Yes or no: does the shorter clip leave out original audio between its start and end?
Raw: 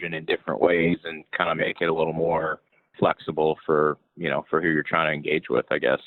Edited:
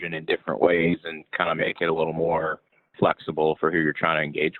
yes